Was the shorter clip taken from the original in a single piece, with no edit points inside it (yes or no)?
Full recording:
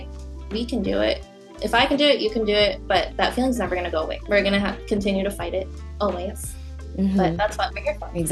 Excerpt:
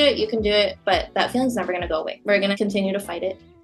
no